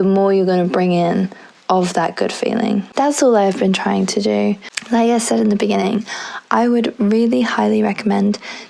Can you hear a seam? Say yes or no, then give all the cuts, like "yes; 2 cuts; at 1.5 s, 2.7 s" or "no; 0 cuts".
no; 0 cuts